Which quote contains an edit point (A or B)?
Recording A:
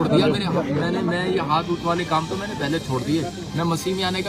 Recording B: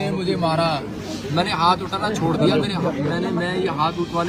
B